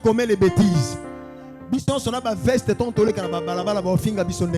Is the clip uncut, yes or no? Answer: yes